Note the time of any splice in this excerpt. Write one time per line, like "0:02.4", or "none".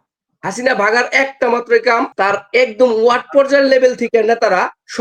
0:02.1